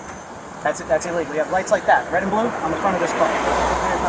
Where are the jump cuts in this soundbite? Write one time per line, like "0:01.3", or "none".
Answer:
none